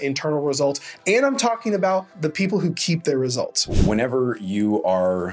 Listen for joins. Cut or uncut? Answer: cut